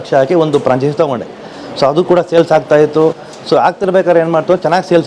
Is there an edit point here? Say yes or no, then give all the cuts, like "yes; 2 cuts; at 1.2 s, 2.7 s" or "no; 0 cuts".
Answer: no; 0 cuts